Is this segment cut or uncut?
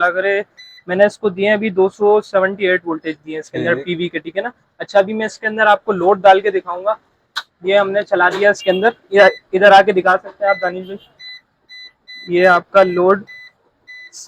uncut